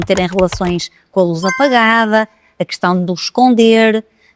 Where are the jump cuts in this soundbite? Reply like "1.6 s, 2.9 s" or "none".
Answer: none